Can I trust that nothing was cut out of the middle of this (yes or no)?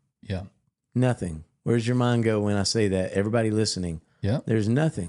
no